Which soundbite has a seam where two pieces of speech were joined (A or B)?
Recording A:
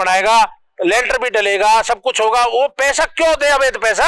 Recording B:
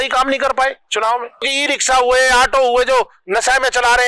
B